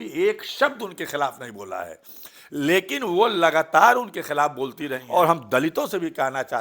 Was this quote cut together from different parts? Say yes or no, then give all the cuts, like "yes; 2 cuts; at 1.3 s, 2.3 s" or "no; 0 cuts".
yes; 1 cut; at 5.0 s